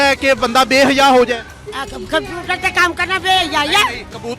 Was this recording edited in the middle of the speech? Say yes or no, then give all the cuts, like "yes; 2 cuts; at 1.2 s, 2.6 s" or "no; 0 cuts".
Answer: no; 0 cuts